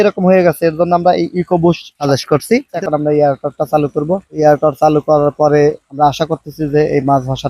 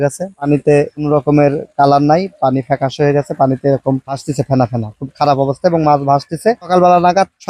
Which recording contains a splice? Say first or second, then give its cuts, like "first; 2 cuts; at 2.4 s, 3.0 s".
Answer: first; 1 cut; at 2.7 s